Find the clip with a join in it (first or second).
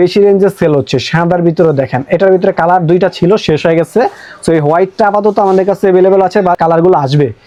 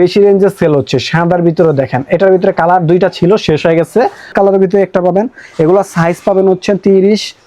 second